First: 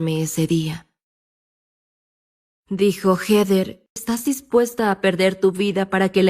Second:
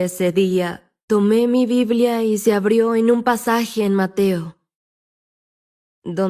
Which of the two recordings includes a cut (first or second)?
first